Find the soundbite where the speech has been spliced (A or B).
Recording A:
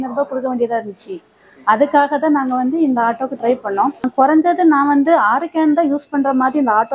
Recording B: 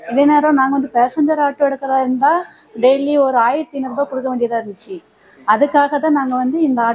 A